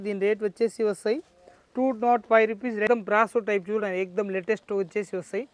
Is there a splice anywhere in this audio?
yes; 1 cut; at 2.9 s

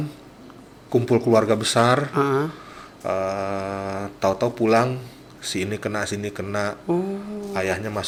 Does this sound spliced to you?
no; 0 cuts

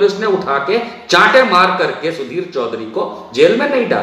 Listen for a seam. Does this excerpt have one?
no; 0 cuts

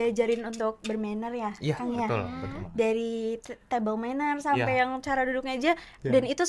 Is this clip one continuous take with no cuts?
yes; 0 cuts

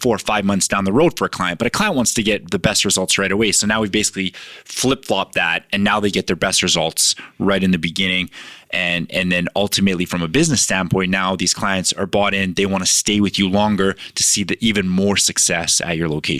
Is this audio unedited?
yes; 0 cuts

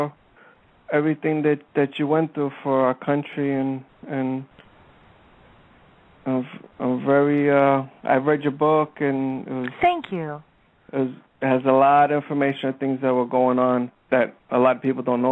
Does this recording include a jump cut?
yes; 1 cut; at 6.7 s

